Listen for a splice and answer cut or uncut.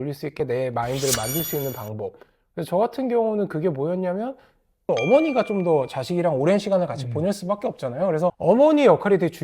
cut